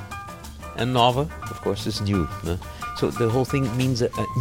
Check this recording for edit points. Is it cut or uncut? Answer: cut